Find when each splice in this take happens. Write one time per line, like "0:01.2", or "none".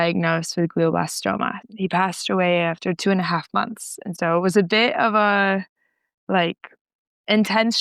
0:01.6
0:04.1